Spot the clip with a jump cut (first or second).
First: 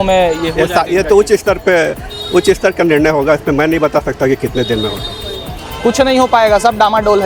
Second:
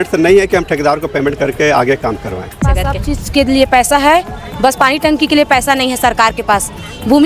second